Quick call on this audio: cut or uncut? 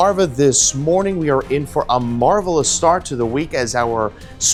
uncut